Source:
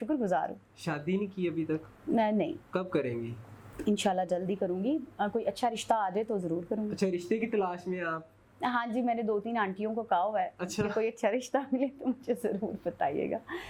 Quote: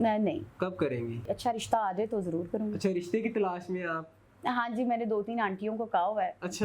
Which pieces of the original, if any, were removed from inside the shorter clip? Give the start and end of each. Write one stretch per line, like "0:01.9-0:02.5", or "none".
0:03.4-0:05.4